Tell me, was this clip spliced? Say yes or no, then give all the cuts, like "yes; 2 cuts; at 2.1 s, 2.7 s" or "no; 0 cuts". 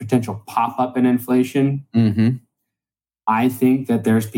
no; 0 cuts